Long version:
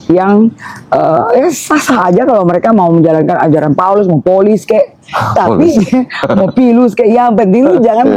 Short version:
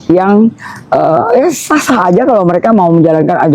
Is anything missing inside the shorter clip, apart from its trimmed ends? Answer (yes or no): no